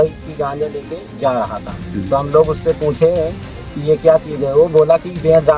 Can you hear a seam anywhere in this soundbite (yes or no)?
no